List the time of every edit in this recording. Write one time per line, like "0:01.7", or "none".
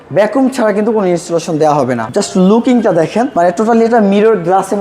0:02.0
0:03.3

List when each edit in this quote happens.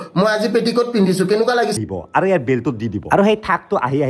0:01.8

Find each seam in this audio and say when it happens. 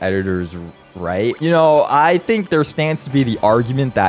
none

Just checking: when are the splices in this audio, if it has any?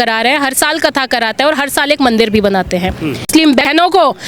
0:03.3

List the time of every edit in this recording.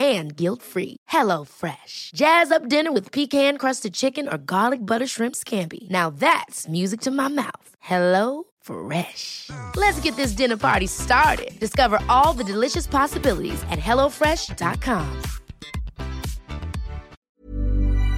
0:17.3

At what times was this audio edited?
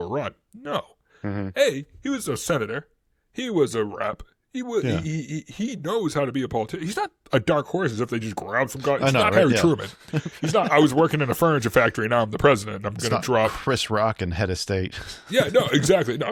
none

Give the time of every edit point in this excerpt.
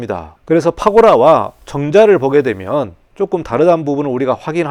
none

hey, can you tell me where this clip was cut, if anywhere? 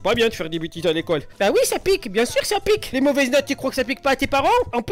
0:01.3
0:02.9

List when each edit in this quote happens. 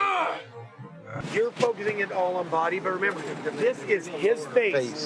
0:01.1

